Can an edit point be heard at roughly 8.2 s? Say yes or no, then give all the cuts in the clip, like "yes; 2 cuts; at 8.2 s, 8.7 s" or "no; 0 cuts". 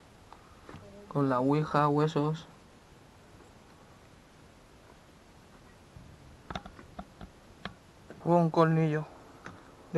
yes; 1 cut; at 8.2 s